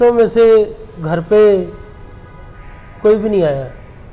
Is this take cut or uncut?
uncut